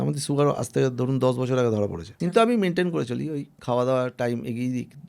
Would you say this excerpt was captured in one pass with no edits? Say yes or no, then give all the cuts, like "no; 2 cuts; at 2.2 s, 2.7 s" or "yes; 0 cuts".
no; 1 cut; at 2.1 s